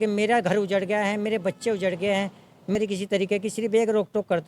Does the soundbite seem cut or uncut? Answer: cut